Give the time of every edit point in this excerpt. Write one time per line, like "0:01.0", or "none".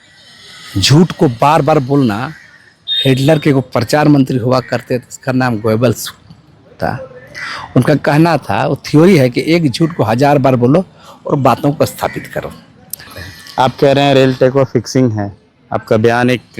0:13.2